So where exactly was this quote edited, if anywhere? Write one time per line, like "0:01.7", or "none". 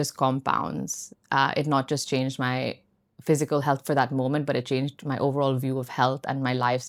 none